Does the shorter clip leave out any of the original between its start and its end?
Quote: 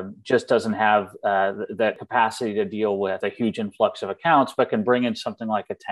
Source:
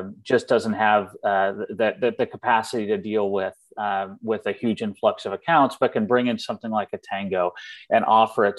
yes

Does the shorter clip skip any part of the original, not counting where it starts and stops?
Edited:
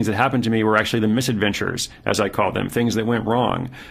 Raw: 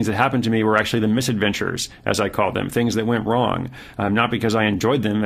no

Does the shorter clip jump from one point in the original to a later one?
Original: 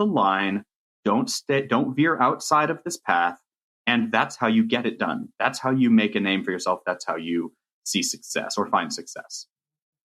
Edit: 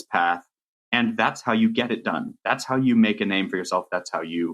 no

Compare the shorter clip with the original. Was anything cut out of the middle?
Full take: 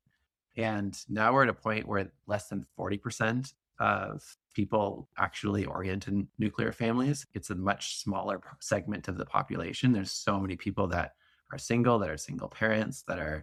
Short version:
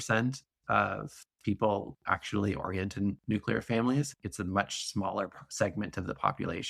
no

